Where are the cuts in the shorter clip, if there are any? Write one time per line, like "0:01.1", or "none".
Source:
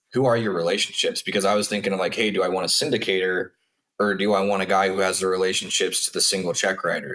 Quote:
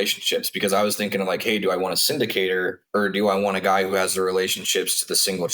0:02.8